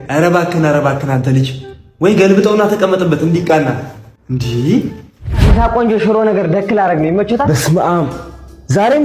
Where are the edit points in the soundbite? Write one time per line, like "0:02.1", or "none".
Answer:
0:05.5